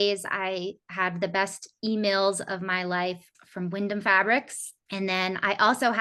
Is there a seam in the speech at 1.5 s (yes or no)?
no